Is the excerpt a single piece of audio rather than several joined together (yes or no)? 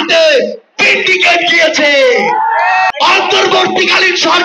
no